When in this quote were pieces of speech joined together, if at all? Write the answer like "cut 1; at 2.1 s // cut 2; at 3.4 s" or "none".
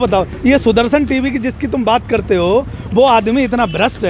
none